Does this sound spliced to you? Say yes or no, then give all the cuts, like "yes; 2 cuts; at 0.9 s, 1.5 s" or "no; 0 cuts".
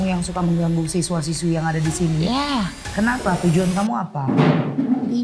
no; 0 cuts